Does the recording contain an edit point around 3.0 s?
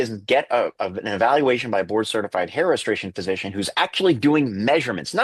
no; 0 cuts

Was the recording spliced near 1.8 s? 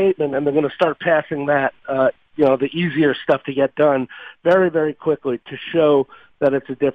no; 0 cuts

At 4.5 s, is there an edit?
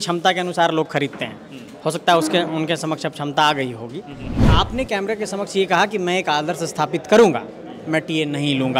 yes; 1 cut; at 4.5 s

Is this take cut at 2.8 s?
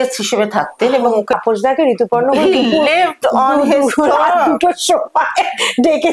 no; 1 cut; at 1.4 s

